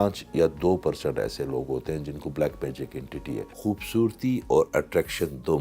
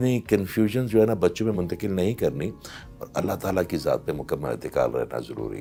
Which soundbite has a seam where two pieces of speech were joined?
first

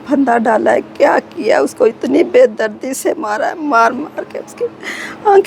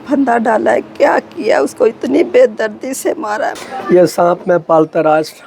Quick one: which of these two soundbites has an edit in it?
second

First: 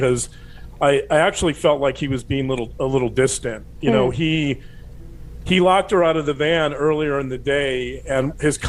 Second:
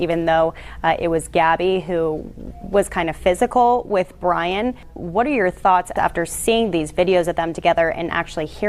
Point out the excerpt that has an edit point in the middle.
second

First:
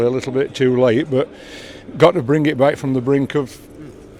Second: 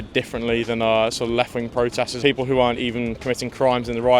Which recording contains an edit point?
second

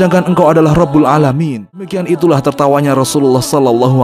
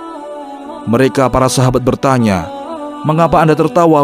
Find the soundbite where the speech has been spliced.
first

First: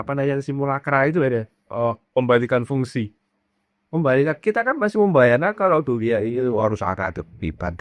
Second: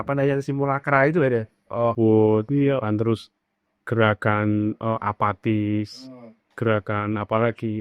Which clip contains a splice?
second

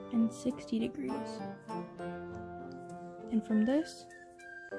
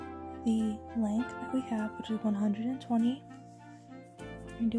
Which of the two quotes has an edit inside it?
first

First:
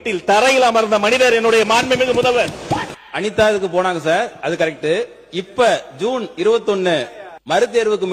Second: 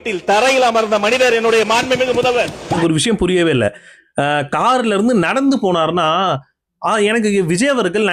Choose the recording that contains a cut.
first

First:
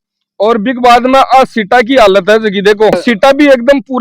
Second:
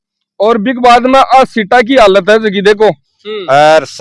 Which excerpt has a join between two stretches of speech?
second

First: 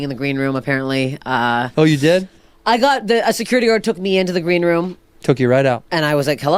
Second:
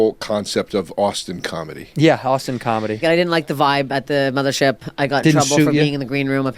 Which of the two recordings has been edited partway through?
second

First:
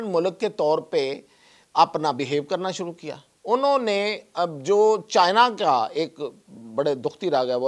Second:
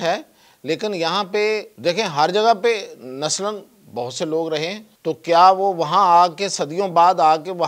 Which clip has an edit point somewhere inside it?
second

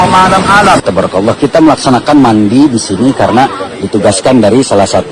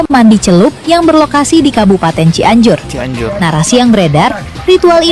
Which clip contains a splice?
first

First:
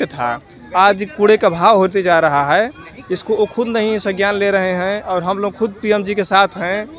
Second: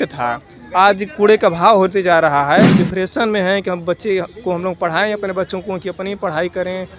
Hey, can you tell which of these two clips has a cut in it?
second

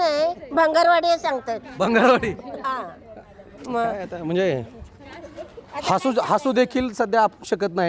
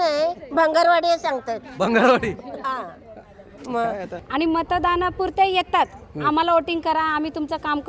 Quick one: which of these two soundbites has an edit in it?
second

